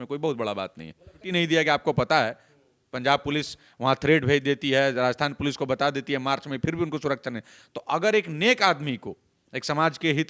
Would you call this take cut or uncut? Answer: uncut